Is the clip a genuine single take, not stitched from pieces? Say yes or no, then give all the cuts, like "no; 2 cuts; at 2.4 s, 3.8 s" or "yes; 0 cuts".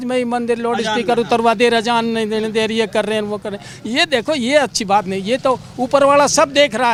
yes; 0 cuts